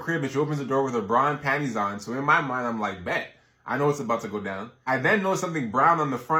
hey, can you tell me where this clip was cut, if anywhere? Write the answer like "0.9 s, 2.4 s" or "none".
none

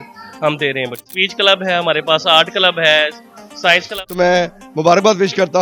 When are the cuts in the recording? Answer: 1.1 s, 3.9 s

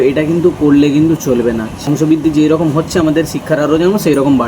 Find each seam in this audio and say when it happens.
1.7 s

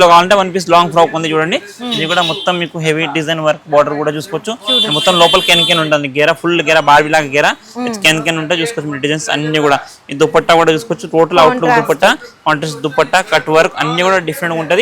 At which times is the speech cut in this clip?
none

